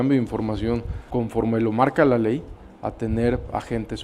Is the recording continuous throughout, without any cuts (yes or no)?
no